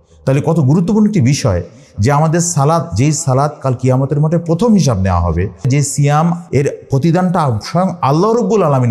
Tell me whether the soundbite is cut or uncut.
cut